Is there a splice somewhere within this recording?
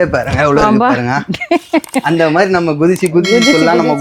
no; 0 cuts

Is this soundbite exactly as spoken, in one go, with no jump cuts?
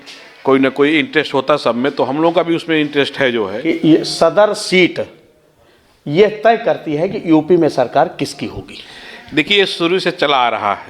no; 1 cut; at 3.6 s

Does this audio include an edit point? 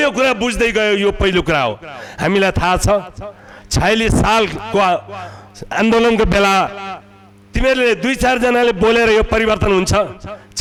no; 0 cuts

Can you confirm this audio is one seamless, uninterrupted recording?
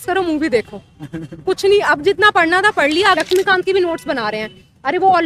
no; 1 cut; at 3.0 s

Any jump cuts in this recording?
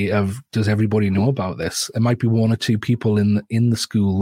no; 0 cuts

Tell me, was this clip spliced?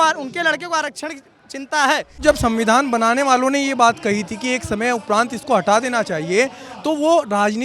yes; 1 cut; at 2.2 s

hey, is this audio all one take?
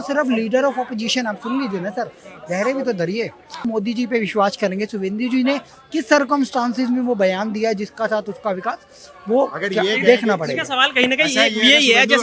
yes; 0 cuts

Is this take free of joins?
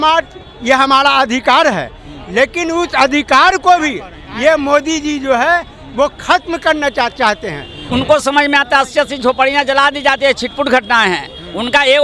no; 1 cut; at 7.8 s

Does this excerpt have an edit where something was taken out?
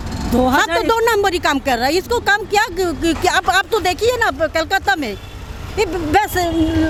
no; 0 cuts

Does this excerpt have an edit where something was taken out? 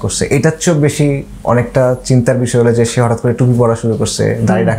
no; 0 cuts

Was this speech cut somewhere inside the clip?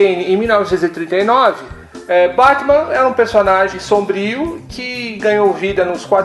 yes; 1 cut; at 3.4 s

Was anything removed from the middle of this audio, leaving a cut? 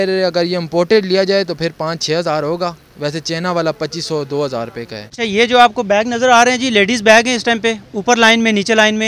no; 0 cuts

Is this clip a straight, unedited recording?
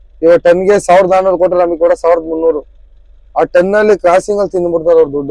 yes; 0 cuts

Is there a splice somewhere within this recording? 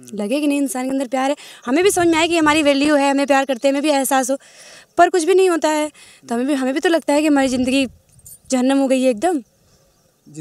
no; 0 cuts

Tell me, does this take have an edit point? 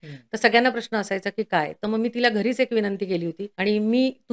yes; 1 cut; at 3.4 s

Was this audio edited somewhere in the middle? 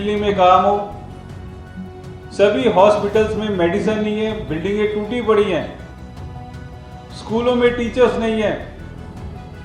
yes; 2 cuts; at 5.8 s, 7.2 s

